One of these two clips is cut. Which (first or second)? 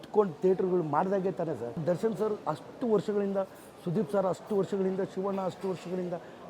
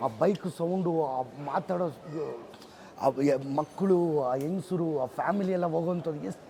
first